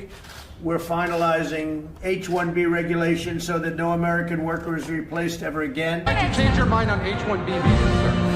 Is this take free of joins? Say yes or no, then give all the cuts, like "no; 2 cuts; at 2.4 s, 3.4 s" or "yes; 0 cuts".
no; 1 cut; at 6.1 s